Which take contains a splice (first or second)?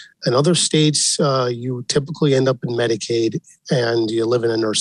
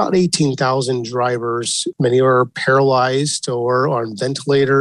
second